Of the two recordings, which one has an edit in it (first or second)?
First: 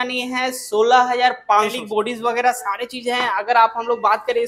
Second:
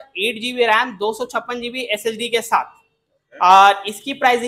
first